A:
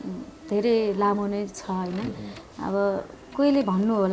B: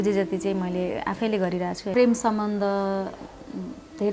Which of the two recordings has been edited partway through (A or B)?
B